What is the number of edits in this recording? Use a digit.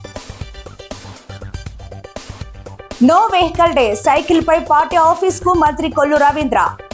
1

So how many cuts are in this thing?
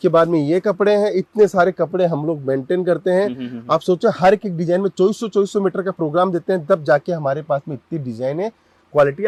0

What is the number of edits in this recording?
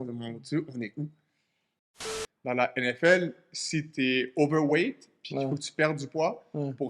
1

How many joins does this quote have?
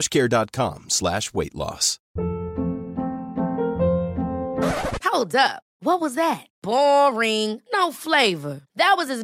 1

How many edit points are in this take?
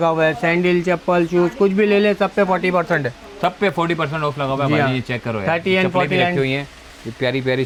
0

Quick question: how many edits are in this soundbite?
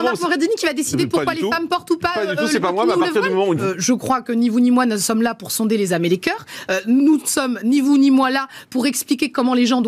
1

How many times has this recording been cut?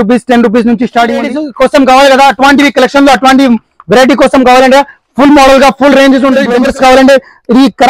2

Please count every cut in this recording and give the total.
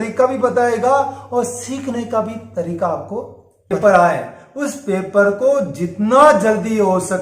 1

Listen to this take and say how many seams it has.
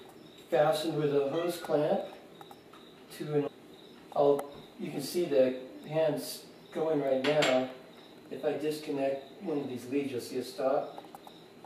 0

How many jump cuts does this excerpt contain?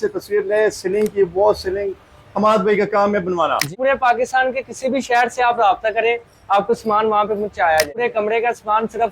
2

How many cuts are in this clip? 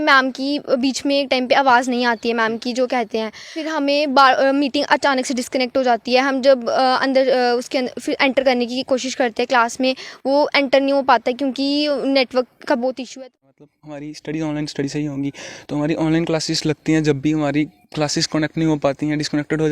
2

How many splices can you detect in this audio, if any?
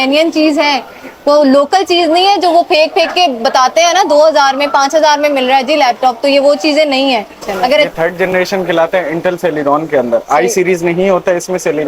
1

